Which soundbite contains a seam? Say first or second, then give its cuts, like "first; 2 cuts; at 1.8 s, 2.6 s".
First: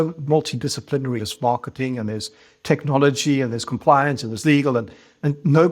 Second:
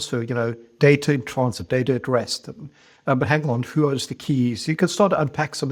first; 1 cut; at 1.2 s